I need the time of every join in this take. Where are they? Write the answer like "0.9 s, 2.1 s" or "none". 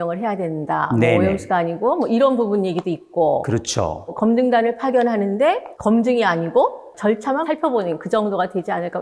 none